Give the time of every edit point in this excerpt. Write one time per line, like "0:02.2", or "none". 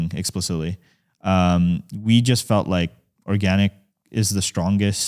none